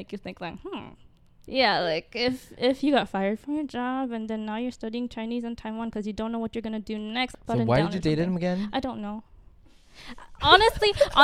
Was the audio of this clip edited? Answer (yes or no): yes